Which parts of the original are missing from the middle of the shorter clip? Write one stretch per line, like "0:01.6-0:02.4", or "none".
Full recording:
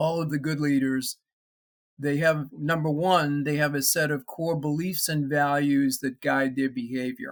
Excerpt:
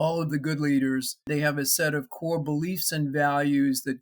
0:01.3-0:03.4